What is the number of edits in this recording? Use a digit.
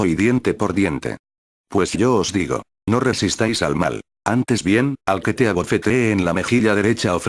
1